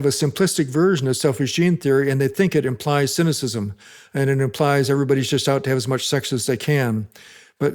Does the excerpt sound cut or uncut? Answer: uncut